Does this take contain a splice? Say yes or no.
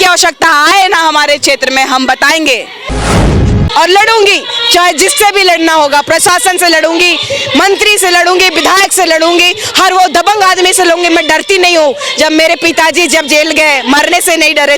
yes